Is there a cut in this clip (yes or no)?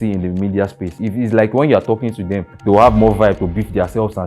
yes